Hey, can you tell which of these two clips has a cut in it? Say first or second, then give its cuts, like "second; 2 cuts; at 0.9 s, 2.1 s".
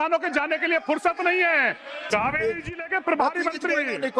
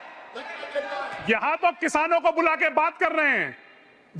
first; 1 cut; at 2.0 s